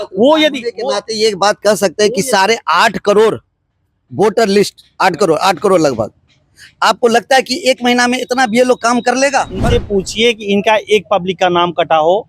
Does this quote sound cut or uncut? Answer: cut